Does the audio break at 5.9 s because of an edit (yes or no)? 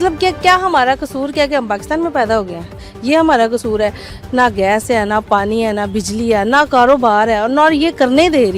no